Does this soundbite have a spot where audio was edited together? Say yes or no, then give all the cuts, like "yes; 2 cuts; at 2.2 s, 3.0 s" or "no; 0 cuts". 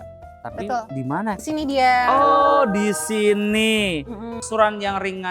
yes; 2 cuts; at 1.4 s, 4.4 s